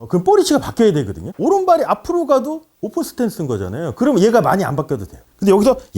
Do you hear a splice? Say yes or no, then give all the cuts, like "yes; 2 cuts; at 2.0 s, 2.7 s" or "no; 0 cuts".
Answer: yes; 1 cut; at 1.2 s